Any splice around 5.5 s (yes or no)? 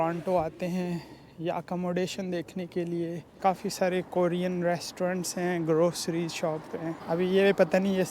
no